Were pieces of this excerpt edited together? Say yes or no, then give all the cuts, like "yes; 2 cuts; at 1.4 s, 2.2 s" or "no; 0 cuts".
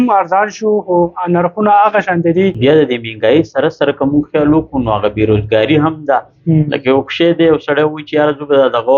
yes; 1 cut; at 2.6 s